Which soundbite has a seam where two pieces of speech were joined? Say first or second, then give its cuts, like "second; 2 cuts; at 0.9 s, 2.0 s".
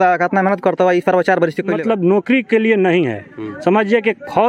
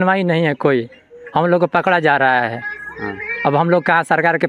first; 1 cut; at 1.7 s